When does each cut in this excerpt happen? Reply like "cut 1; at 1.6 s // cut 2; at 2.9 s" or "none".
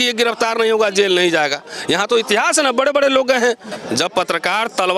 cut 1; at 3.8 s